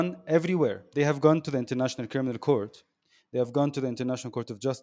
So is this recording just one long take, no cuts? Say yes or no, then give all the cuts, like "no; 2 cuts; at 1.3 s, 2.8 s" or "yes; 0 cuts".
yes; 0 cuts